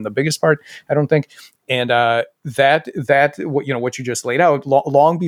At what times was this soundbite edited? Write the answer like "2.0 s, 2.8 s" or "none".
none